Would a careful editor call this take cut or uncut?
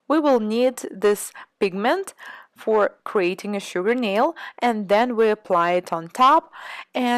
cut